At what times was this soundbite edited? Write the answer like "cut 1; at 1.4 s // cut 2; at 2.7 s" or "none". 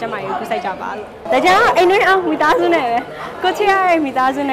cut 1; at 1.2 s

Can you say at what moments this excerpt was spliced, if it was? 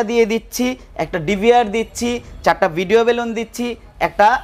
none

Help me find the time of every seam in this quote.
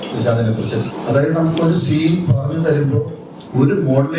cut 1; at 0.9 s

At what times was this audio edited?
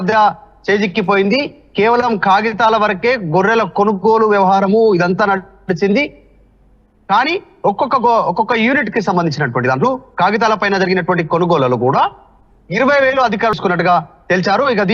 cut 1; at 13.5 s

